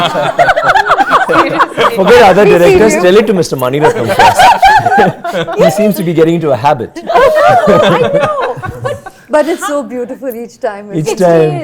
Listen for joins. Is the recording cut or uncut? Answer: uncut